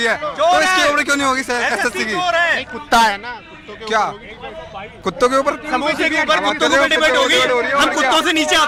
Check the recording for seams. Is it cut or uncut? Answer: uncut